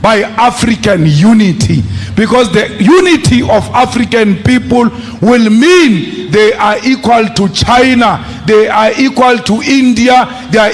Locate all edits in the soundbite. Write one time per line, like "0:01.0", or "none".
none